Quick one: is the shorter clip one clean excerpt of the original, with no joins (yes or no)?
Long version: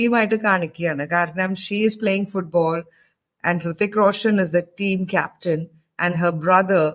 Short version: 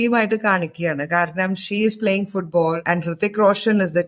no